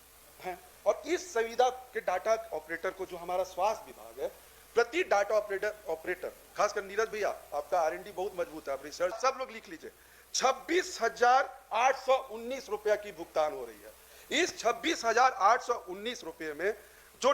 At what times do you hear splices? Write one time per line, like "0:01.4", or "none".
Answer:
0:09.2